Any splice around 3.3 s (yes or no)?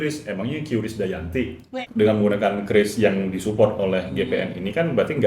no